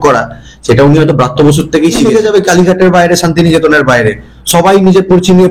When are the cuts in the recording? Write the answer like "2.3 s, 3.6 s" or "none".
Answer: 2.0 s